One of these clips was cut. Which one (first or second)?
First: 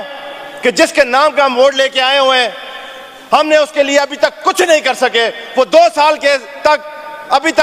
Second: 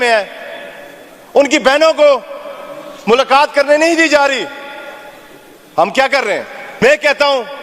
second